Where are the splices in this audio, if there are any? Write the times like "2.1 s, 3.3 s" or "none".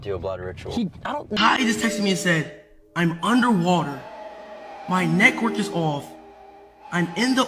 1.3 s